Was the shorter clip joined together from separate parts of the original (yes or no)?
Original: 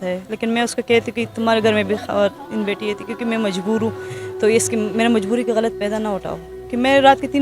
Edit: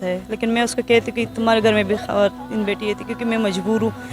no